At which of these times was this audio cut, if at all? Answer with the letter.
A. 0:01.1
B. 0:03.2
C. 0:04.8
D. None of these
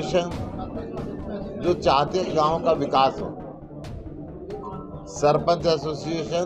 D